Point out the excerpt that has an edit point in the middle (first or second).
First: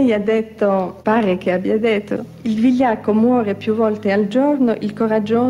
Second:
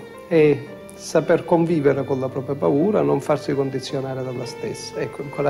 first